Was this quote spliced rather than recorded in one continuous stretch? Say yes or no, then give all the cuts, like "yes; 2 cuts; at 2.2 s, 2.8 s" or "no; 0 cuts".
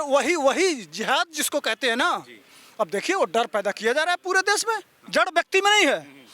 yes; 1 cut; at 5.0 s